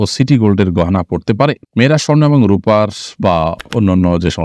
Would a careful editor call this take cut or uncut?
uncut